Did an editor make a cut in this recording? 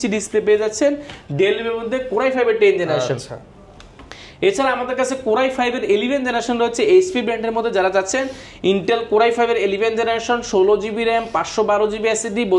no; 0 cuts

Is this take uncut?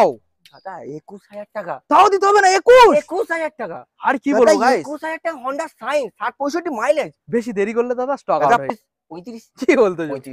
no; 1 cut; at 8.7 s

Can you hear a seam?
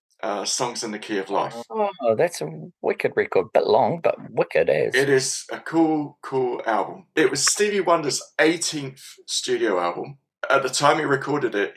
yes; 2 cuts; at 7.0 s, 10.3 s

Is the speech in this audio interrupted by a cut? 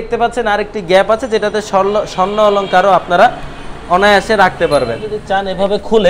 yes; 1 cut; at 5.2 s

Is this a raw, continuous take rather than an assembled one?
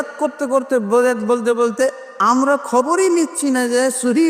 yes; 0 cuts

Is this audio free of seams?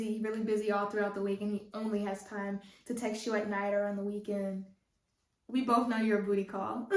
yes; 0 cuts

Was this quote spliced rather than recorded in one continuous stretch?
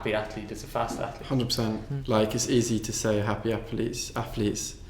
yes; 1 cut; at 1.9 s

